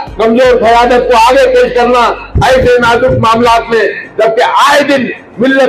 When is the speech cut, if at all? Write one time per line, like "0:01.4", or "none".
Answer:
none